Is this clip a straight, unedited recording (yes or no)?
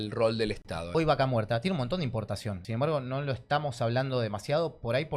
no